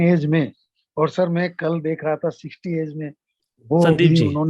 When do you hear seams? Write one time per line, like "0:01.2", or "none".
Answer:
0:03.5